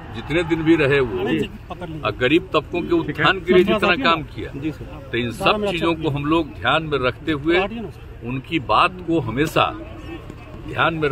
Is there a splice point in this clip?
yes; 1 cut; at 1.3 s

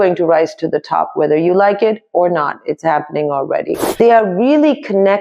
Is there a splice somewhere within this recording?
yes; 1 cut; at 4.0 s

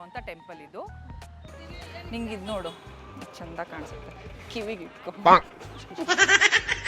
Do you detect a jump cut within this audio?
yes; 1 cut; at 1.5 s

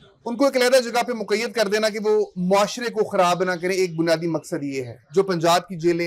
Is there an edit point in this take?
yes; 1 cut; at 5.1 s

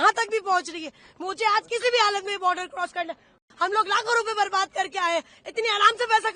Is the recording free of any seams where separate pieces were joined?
no; 1 cut; at 3.4 s

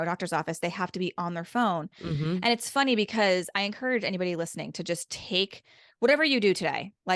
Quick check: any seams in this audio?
no; 0 cuts

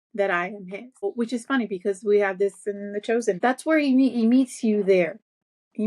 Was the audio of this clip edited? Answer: yes; 2 cuts; at 1.0 s, 3.4 s

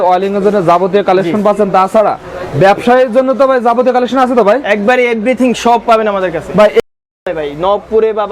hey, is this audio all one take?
no; 1 cut; at 6.9 s

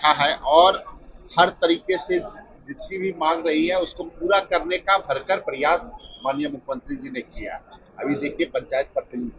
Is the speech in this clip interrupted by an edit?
no; 0 cuts

